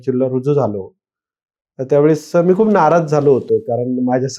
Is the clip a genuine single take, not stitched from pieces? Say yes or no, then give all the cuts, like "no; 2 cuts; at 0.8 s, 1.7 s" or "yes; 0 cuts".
yes; 0 cuts